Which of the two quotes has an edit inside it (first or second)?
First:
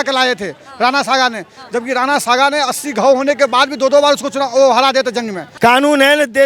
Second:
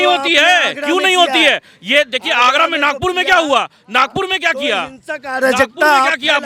first